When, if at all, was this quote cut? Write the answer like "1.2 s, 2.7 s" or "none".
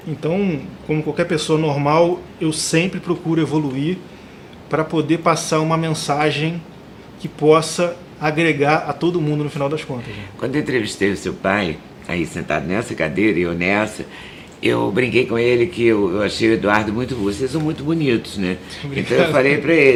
none